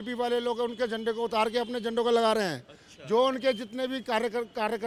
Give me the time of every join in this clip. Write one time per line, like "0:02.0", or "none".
none